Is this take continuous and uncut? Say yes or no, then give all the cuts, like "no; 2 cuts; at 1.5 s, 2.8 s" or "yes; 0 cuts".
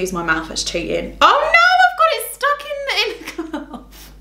yes; 0 cuts